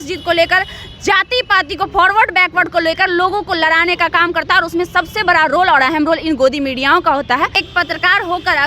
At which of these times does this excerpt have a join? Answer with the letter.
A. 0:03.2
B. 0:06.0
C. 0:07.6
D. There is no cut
C